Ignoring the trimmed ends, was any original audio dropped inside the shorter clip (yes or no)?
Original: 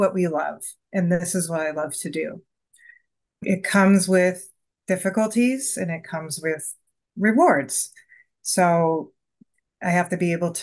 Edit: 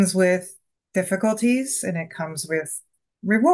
no